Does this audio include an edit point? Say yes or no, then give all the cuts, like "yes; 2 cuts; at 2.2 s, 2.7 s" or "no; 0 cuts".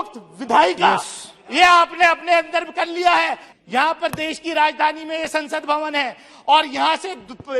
yes; 1 cut; at 3.5 s